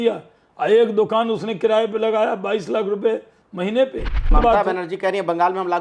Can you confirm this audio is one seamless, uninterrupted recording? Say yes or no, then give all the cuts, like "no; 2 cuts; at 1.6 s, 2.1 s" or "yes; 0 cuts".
no; 1 cut; at 4.3 s